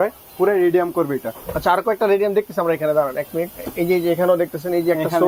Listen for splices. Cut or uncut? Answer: uncut